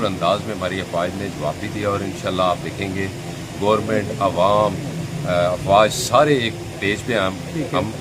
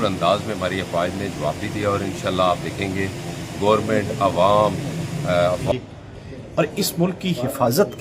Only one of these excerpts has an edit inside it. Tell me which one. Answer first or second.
second